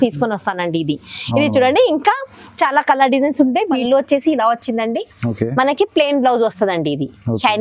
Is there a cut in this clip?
yes; 1 cut; at 3.8 s

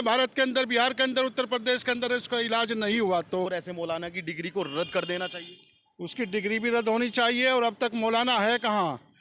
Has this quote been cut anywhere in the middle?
no; 0 cuts

